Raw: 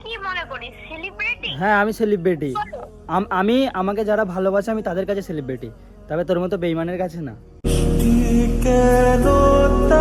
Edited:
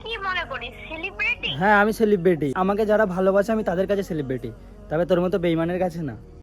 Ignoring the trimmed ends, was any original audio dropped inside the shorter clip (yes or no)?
yes